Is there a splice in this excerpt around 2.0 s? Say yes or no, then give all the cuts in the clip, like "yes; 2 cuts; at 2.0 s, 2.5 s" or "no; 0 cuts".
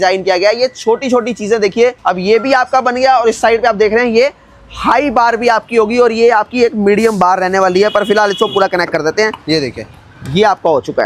yes; 1 cut; at 2.0 s